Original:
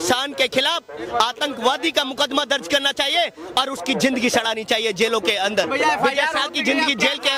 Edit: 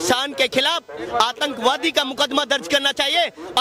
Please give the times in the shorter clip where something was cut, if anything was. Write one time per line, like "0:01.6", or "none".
none